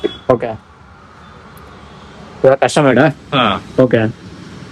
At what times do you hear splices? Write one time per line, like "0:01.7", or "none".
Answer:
none